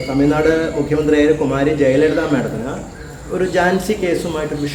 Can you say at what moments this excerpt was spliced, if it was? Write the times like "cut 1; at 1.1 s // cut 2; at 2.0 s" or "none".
none